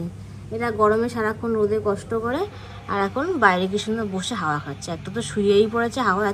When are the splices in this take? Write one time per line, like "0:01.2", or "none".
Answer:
none